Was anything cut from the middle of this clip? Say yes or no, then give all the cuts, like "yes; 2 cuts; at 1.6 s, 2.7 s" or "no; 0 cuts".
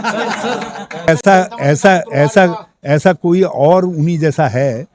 no; 0 cuts